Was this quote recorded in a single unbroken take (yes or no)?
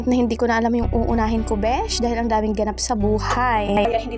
yes